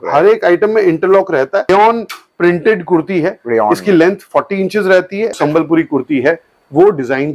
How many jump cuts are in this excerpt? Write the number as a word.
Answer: two